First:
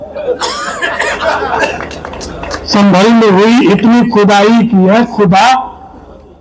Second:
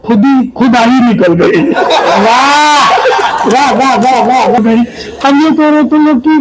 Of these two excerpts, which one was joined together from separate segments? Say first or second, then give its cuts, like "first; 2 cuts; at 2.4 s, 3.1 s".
second; 1 cut; at 4.6 s